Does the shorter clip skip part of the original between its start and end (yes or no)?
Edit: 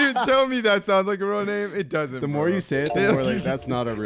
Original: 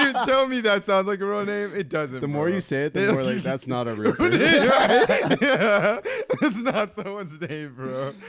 no